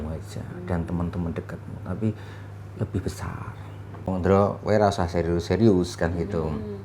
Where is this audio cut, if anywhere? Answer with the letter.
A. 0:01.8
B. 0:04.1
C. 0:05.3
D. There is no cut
B